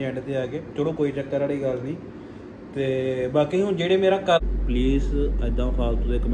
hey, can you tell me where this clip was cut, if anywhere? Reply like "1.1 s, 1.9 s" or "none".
4.4 s